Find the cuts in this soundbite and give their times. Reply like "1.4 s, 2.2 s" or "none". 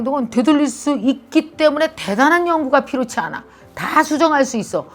none